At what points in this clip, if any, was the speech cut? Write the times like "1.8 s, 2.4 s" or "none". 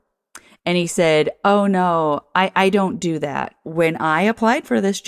3.6 s